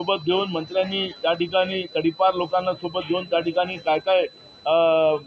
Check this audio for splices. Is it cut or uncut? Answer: uncut